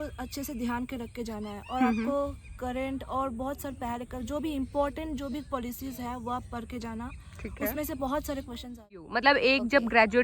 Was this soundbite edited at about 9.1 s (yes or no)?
yes